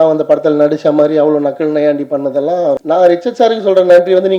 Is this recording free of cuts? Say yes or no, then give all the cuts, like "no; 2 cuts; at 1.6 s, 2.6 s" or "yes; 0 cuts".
no; 1 cut; at 2.8 s